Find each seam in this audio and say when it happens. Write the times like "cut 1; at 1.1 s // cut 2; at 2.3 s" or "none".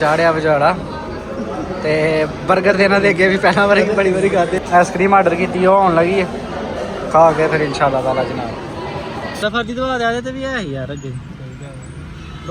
cut 1; at 4.6 s // cut 2; at 9.3 s